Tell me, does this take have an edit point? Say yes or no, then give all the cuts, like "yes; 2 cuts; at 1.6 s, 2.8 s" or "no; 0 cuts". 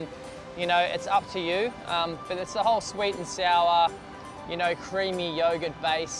yes; 1 cut; at 1.2 s